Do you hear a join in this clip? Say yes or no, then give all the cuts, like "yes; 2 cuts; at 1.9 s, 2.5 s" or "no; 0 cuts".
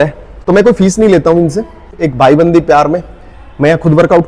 yes; 1 cut; at 2.0 s